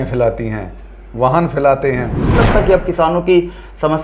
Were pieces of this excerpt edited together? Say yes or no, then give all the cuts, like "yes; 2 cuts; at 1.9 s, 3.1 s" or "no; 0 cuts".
yes; 1 cut; at 2.3 s